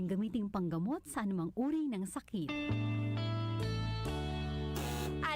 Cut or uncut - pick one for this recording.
cut